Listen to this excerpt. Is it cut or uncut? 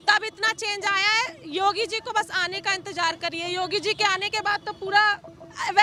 uncut